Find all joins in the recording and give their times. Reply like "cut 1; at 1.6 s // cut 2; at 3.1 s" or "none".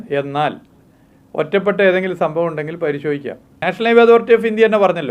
cut 1; at 3.6 s